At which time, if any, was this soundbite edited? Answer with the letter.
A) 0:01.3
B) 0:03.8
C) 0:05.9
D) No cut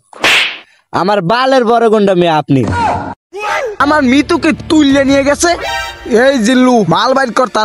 B